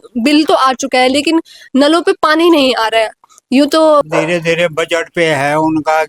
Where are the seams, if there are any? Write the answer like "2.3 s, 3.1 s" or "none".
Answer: 4.1 s